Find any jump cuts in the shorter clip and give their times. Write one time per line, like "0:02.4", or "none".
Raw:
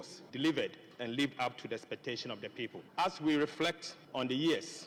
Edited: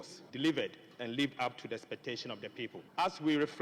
none